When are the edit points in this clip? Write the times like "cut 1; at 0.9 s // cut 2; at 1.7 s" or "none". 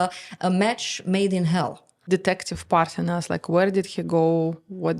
cut 1; at 2.1 s